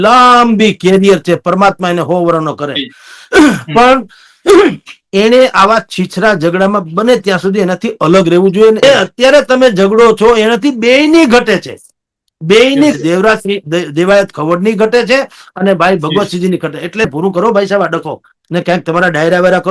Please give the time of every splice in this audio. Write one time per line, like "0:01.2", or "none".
0:08.8
0:17.1